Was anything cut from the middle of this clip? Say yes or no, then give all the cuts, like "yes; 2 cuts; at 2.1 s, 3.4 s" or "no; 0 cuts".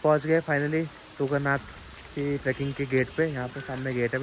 no; 0 cuts